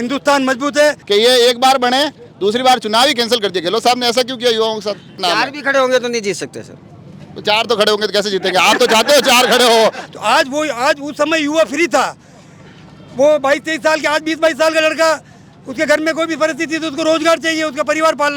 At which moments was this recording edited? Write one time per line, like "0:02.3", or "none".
0:01.0
0:05.2
0:10.0